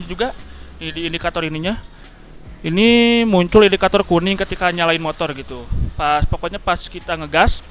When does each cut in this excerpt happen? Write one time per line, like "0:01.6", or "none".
none